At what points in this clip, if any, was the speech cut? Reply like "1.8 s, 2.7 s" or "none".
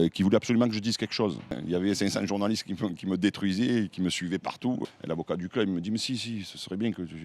1.6 s, 4.8 s

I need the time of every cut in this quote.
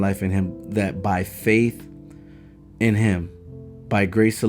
none

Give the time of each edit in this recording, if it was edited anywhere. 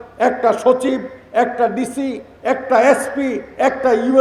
none

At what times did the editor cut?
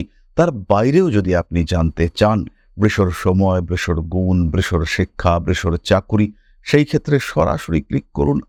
none

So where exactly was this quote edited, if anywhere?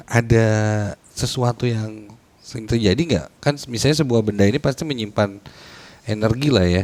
none

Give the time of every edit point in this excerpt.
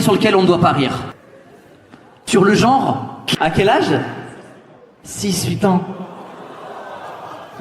3.2 s

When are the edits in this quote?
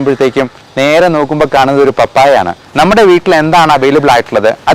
2.6 s

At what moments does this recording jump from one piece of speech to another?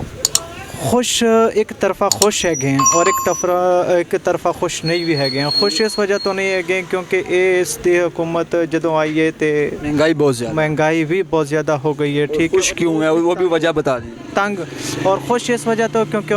none

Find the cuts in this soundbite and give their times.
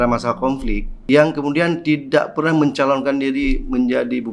0.9 s

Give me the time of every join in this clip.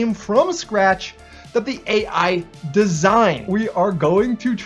3.5 s

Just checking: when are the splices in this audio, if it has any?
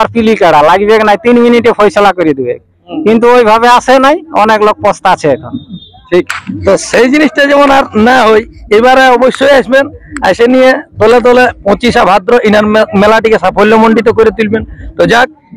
none

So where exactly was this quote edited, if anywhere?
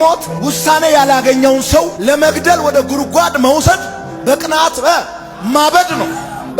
none

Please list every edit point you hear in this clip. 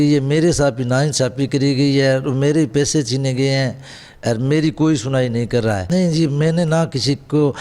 5.8 s

